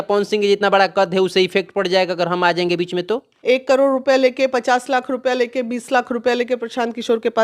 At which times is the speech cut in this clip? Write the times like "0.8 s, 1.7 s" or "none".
3.3 s